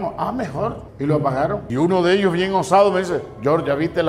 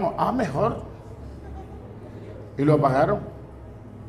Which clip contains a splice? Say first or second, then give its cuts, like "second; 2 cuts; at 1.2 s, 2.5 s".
first; 2 cuts; at 0.9 s, 1.7 s